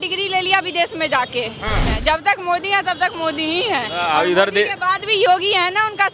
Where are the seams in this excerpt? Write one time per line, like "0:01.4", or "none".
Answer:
0:01.9